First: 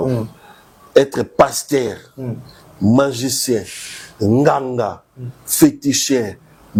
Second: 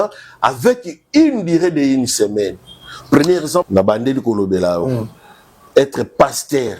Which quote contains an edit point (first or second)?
second